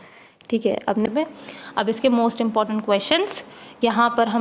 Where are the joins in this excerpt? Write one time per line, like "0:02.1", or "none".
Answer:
0:01.1